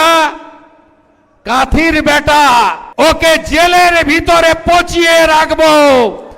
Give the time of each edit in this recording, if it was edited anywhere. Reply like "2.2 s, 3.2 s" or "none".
2.8 s